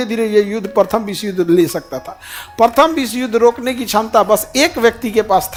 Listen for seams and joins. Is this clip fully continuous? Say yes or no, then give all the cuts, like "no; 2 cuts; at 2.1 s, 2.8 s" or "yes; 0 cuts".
yes; 0 cuts